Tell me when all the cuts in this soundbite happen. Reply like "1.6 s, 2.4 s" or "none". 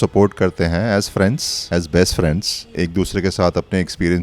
1.5 s, 2.7 s